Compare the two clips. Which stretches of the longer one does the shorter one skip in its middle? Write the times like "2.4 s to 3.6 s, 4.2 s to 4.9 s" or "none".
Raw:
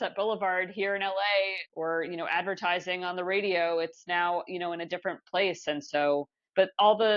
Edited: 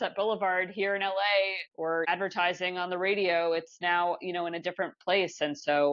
1.8 s to 2.0 s